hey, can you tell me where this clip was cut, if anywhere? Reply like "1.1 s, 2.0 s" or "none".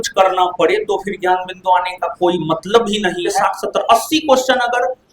3.4 s